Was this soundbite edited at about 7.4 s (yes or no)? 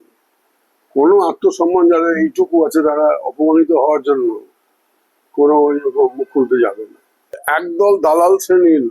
yes